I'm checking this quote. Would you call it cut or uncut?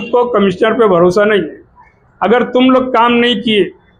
uncut